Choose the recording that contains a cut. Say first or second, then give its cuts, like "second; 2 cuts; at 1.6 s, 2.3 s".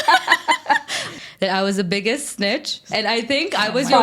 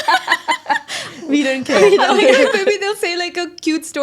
first; 1 cut; at 1.1 s